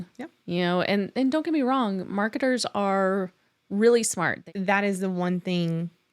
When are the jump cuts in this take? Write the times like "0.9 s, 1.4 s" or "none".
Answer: 4.4 s